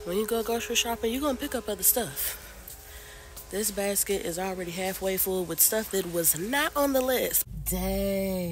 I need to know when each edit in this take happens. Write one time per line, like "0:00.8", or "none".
0:07.4